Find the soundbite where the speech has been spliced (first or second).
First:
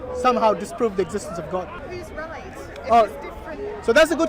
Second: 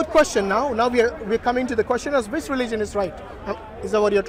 first